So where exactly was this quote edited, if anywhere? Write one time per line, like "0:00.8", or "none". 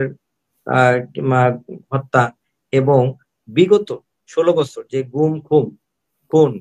none